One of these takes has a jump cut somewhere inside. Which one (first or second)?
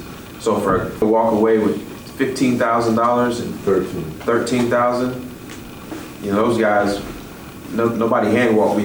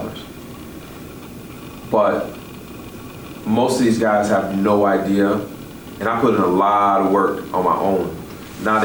first